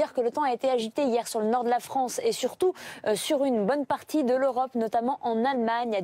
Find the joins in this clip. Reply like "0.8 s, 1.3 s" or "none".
1.8 s